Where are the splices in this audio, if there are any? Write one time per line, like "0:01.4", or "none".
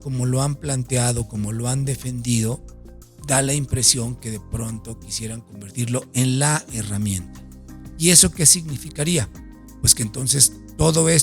none